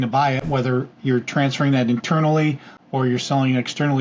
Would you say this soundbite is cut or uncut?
uncut